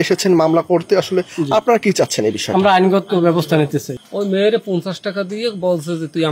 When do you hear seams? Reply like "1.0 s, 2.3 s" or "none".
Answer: 4.0 s